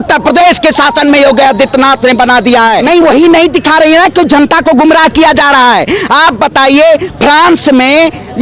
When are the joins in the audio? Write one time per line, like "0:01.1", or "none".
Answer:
0:02.8